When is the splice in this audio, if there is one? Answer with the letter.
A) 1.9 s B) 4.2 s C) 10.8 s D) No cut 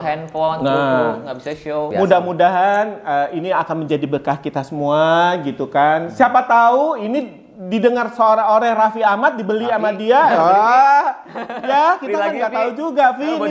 A